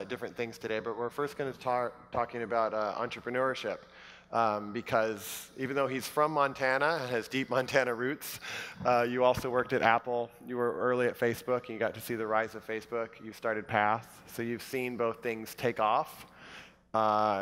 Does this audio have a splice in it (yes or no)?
yes